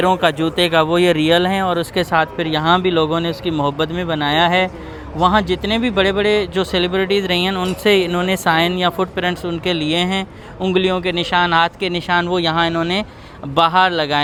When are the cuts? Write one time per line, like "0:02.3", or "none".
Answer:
none